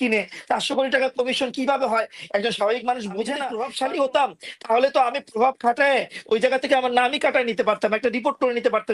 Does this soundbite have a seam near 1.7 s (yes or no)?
no